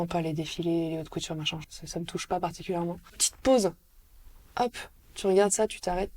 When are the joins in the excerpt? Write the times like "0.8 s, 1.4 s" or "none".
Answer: 1.7 s, 3.3 s